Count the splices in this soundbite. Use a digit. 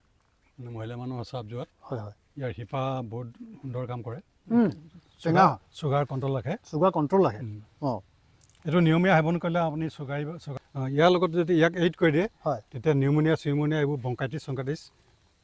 2